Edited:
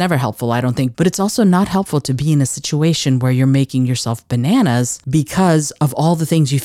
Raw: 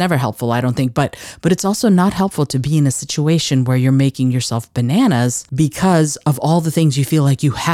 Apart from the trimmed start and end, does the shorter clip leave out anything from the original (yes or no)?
yes